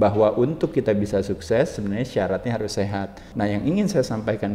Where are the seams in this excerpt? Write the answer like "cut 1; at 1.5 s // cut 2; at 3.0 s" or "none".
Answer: cut 1; at 3.2 s